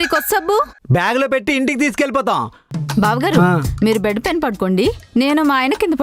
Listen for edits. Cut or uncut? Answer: cut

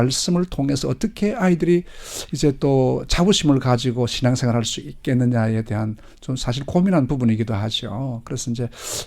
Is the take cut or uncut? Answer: uncut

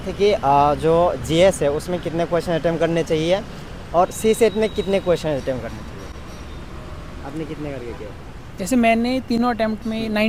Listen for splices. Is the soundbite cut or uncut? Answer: uncut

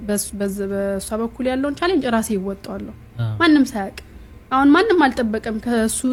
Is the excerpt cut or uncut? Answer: uncut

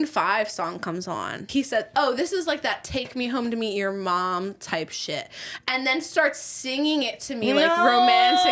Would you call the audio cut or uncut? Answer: cut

